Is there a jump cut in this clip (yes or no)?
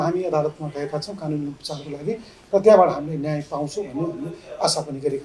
no